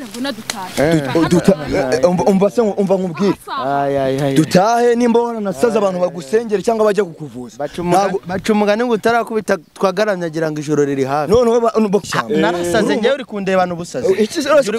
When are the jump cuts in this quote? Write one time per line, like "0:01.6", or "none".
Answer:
0:12.0